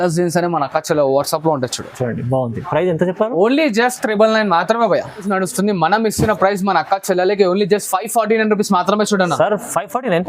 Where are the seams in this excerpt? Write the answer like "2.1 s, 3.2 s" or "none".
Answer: 5.3 s